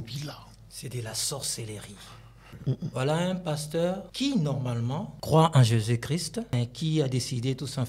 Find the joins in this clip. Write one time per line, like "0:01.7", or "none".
0:02.5
0:04.1
0:05.1
0:06.5